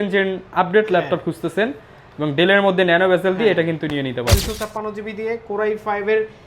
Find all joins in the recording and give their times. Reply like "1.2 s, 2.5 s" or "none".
4.3 s